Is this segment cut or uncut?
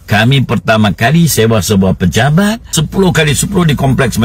cut